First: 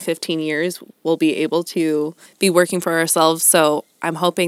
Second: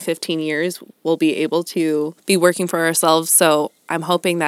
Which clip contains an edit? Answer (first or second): second